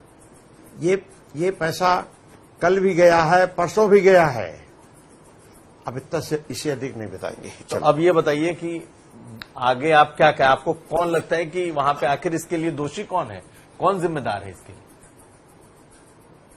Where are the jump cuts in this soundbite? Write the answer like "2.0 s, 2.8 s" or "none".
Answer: none